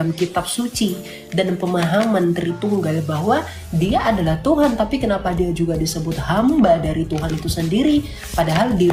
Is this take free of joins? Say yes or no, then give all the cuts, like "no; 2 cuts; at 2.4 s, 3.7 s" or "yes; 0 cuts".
yes; 0 cuts